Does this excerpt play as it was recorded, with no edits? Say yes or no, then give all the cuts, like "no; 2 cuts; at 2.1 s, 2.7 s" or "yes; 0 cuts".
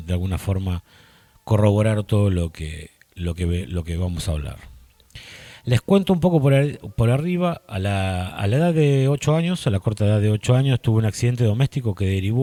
yes; 0 cuts